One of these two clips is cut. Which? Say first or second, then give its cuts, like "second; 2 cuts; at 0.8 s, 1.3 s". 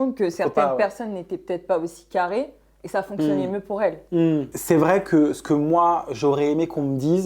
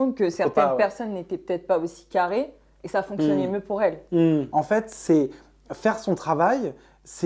second; 1 cut; at 4.5 s